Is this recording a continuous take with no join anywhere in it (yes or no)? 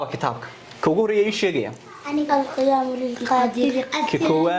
yes